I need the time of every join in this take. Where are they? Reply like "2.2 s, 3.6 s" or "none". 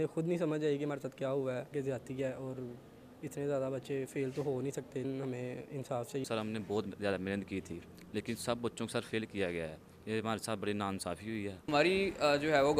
1.7 s, 5.0 s, 6.2 s, 11.7 s